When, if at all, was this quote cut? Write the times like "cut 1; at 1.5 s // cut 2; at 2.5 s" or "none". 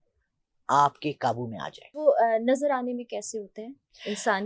cut 1; at 2.0 s